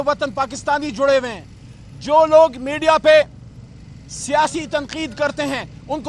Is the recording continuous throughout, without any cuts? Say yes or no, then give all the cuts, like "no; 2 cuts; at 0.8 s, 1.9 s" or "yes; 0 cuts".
yes; 0 cuts